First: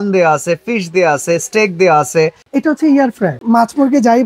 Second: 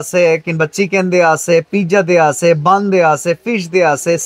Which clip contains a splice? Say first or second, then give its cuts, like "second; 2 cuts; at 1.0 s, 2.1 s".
first; 2 cuts; at 2.4 s, 3.4 s